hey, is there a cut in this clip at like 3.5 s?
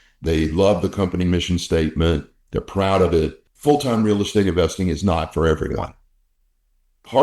yes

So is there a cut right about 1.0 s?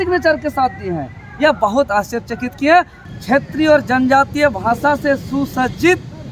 no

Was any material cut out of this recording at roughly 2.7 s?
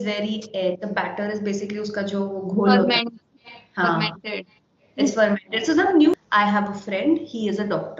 no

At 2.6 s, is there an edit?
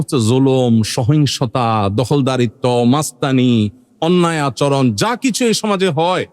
no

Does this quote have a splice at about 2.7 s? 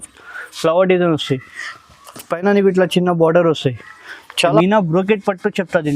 no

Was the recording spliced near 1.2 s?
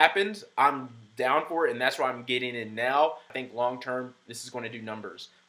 no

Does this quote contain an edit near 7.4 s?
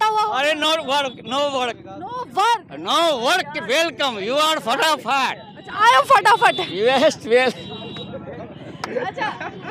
no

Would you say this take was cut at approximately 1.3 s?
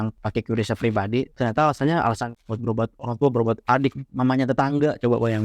yes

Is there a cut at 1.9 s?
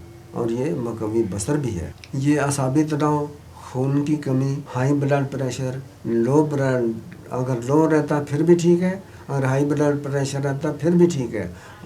yes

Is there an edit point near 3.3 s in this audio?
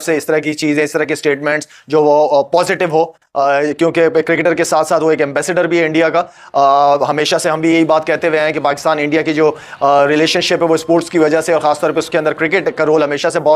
no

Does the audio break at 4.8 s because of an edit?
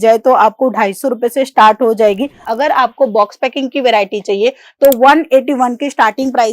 no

